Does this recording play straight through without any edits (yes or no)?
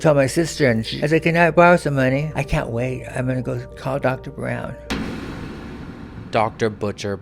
no